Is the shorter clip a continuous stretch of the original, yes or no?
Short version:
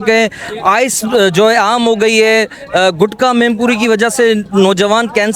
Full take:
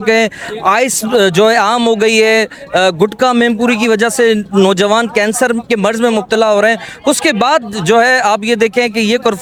yes